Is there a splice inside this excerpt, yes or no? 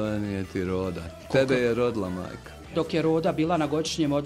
yes